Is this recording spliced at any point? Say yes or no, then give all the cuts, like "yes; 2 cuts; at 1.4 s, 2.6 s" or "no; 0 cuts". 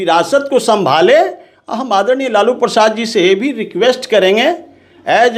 no; 0 cuts